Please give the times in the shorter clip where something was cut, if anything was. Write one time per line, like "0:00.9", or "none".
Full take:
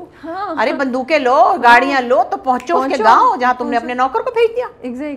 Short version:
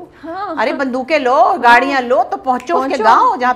none